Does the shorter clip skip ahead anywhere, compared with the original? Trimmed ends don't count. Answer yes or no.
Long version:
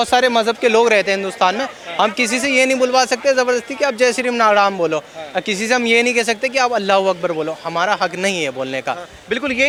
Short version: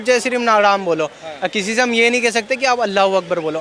no